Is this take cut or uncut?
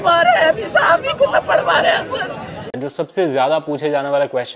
cut